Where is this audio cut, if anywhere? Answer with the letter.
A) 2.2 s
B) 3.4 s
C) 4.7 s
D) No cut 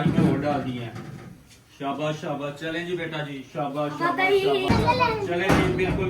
C